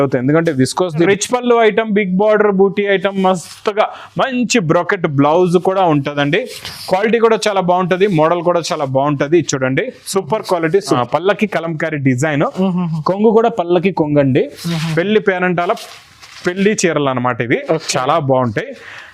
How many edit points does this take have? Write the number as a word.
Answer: two